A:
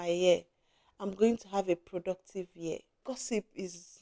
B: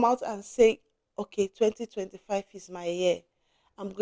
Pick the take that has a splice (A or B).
A